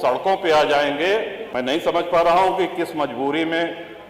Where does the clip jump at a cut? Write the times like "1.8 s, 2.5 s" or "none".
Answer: 1.4 s

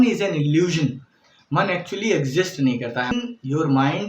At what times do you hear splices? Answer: 3.1 s

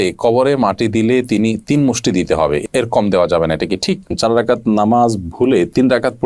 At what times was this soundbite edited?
4.1 s

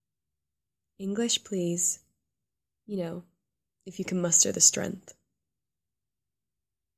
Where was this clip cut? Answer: 2.7 s

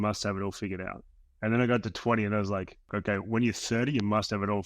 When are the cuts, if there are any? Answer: 3.0 s

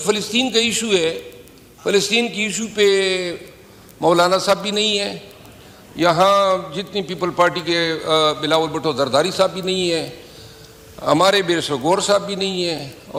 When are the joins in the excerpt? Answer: none

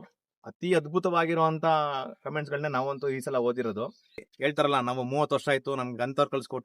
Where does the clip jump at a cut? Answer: 4.3 s

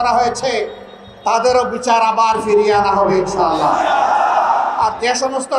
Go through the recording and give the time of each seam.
none

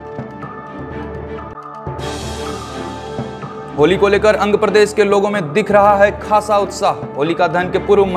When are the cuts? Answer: 1.5 s, 3.4 s

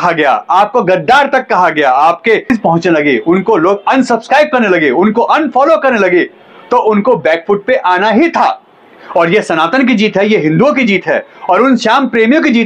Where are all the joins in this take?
2.4 s

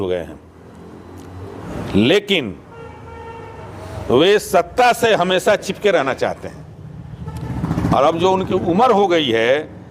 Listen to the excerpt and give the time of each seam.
1.7 s

